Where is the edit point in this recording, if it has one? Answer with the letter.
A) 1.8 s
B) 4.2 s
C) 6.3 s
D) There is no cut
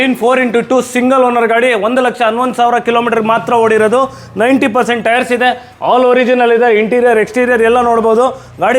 D